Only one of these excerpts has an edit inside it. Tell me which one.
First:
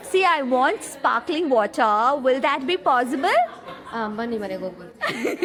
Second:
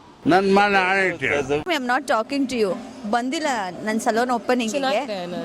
second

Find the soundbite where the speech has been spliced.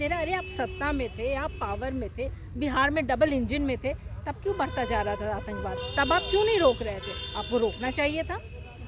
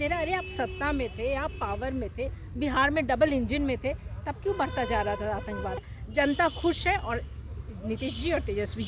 second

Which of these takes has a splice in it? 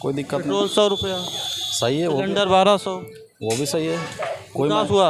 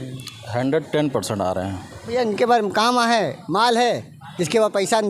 second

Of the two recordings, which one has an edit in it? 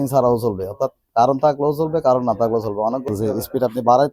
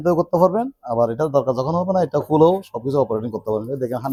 first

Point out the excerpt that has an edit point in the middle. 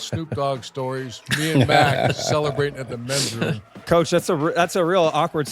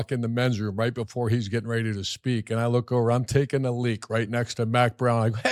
first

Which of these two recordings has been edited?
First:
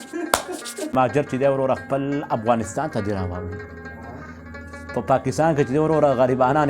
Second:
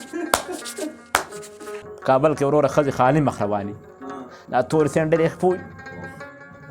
first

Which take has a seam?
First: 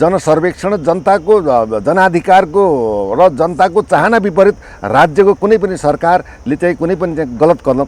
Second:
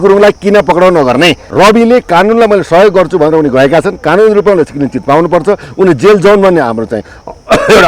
second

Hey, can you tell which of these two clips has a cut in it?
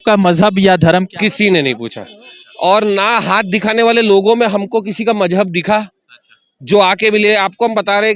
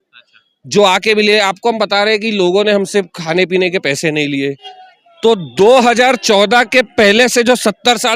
second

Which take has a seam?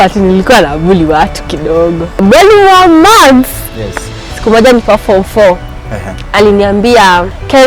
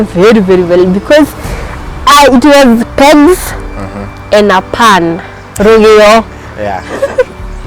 first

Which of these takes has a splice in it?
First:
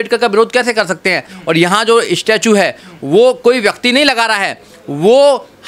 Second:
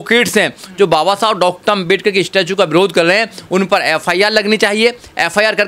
first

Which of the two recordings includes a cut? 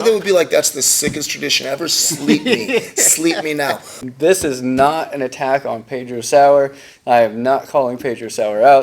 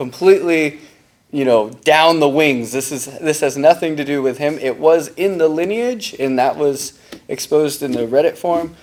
first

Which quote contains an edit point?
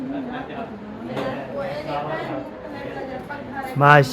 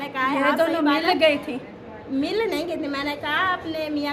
first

